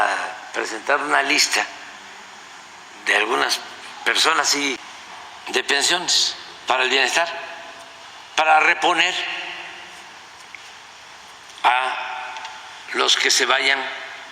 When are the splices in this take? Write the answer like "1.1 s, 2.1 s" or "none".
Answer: 5.0 s